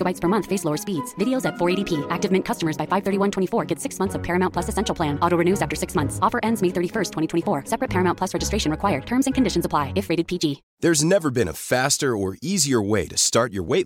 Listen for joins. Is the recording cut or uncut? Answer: cut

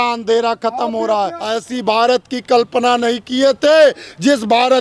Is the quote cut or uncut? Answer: cut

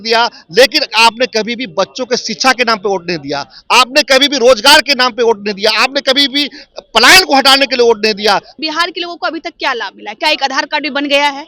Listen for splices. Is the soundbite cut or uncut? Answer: cut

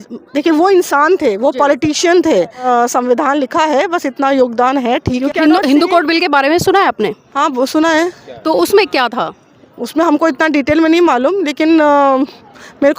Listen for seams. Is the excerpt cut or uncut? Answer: cut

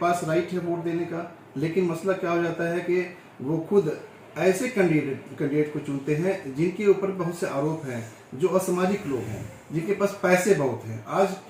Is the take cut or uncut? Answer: uncut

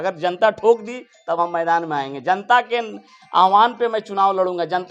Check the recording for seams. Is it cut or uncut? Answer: uncut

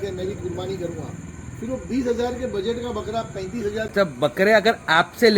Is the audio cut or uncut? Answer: cut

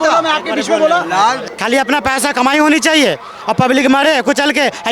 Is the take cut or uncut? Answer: cut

